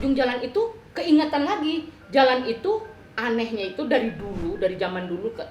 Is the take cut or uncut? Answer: uncut